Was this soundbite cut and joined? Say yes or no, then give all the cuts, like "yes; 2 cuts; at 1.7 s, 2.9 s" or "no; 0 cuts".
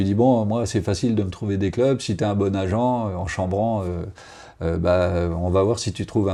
no; 0 cuts